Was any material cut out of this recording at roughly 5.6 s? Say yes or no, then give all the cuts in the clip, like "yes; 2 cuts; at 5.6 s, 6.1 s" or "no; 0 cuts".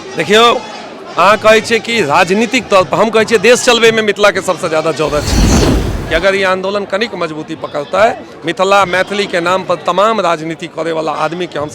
yes; 1 cut; at 5.6 s